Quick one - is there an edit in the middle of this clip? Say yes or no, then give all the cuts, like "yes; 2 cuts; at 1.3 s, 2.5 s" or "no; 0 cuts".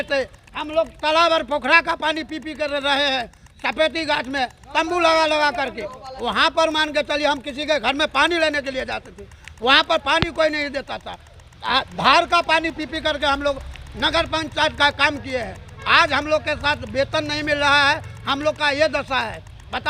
no; 0 cuts